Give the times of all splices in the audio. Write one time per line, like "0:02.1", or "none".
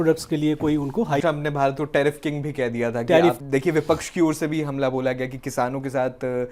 0:01.2
0:03.4